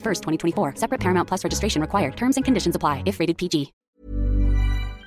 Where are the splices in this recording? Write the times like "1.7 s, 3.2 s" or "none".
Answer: 3.8 s